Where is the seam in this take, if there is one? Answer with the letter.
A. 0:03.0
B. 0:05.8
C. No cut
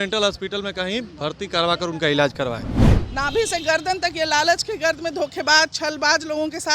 A